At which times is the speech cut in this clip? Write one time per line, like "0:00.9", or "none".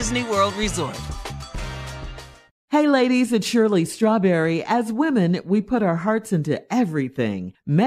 0:02.4